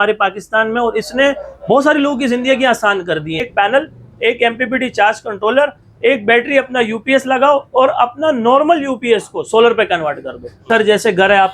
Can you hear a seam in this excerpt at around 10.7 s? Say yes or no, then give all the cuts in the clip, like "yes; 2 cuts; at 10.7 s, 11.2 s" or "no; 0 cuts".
yes; 2 cuts; at 3.5 s, 10.7 s